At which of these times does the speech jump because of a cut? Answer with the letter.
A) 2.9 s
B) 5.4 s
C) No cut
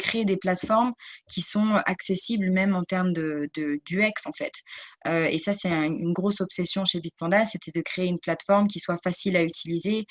C